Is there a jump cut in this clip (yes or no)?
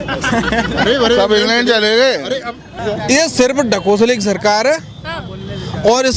yes